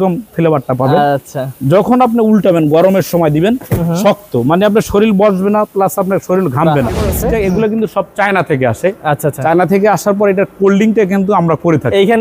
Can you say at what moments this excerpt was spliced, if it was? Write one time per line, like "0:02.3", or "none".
0:07.1